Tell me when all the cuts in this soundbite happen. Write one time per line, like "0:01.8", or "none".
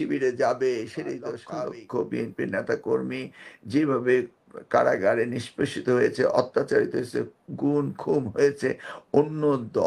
0:01.4